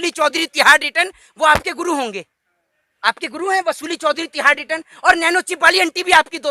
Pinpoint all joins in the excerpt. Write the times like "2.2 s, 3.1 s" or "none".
none